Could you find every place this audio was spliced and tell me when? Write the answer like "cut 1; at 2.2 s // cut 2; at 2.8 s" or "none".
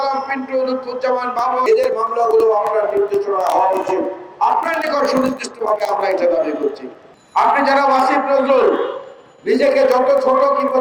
cut 1; at 1.6 s